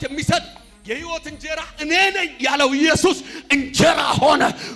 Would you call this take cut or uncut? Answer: uncut